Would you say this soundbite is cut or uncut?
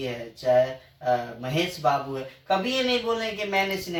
uncut